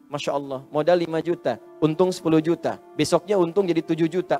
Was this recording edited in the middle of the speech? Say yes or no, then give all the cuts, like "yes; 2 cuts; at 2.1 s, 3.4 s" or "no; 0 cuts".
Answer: yes; 2 cuts; at 1.7 s, 2.8 s